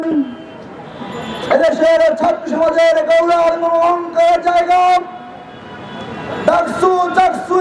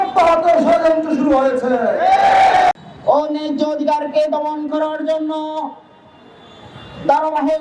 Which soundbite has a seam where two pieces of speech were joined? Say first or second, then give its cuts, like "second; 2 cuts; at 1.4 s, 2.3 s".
second; 1 cut; at 2.8 s